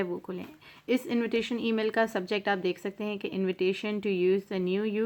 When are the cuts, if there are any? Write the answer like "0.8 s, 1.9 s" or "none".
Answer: none